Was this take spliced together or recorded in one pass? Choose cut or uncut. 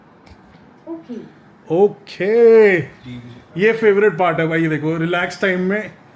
uncut